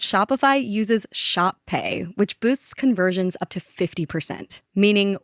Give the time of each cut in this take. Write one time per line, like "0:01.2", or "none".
none